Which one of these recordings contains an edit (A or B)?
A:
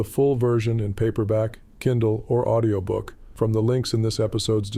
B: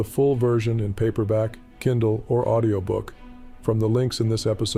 A